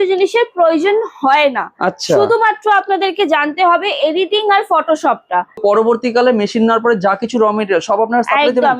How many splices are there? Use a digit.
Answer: 1